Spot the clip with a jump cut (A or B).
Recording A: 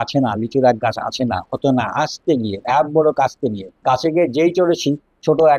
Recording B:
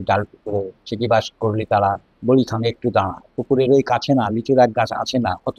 A